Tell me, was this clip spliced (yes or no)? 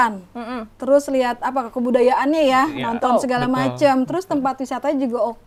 no